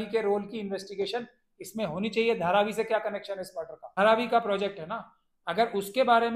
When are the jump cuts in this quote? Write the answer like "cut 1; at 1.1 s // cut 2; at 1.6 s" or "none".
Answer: cut 1; at 3.8 s